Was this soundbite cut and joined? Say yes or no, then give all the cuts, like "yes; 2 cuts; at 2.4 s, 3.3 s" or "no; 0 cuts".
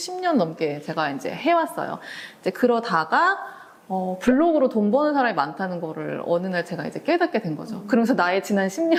no; 0 cuts